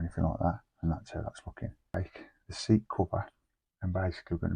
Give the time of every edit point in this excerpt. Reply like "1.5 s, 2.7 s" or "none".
1.8 s